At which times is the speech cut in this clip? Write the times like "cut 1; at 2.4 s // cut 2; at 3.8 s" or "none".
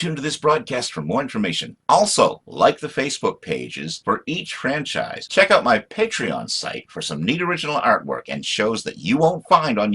cut 1; at 5.2 s